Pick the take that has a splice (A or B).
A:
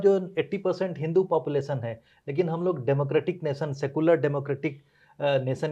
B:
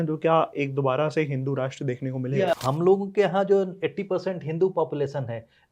B